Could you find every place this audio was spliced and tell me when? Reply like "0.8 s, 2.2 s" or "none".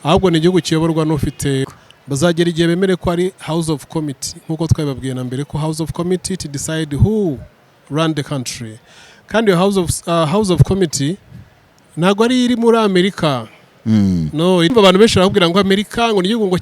1.7 s, 14.7 s